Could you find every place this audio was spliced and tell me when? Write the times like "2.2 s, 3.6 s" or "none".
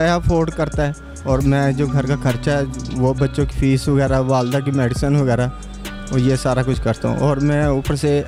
none